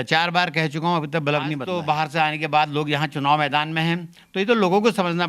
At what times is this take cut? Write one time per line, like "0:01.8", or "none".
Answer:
0:01.6